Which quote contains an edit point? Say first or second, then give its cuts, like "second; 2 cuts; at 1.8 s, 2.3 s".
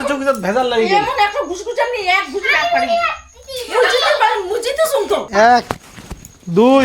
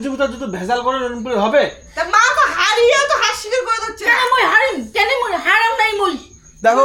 first; 1 cut; at 5.3 s